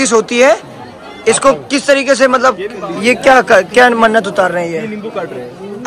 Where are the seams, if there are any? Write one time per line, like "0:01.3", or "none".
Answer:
0:02.8